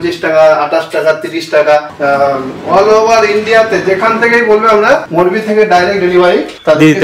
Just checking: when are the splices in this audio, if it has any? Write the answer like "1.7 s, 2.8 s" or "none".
1.9 s